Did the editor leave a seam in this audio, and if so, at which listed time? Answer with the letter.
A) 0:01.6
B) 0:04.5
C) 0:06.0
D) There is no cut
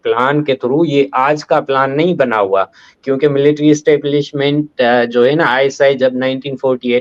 D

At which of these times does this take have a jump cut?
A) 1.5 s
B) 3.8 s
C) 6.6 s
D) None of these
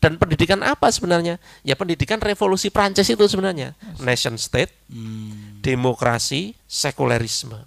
C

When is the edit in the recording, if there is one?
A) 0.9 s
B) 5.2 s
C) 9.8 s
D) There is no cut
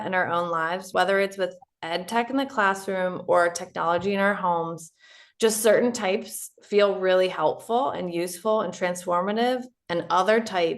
A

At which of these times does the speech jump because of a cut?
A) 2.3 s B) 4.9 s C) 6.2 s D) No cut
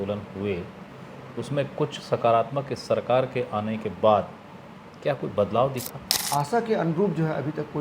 C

